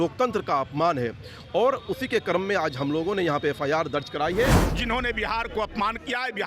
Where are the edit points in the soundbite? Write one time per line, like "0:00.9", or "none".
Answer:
0:04.6